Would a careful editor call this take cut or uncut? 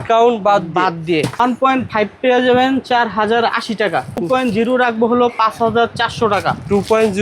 cut